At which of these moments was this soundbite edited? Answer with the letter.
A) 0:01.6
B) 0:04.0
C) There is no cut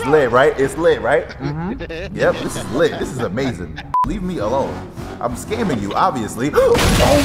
B